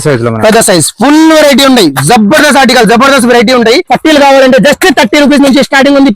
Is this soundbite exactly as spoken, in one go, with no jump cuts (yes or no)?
no